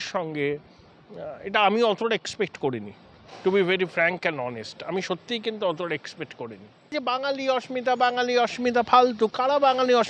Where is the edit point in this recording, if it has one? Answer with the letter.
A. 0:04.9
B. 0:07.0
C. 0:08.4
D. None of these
B